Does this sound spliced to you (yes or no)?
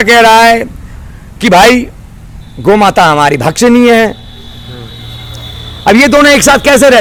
no